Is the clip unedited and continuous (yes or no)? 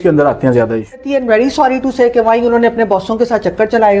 no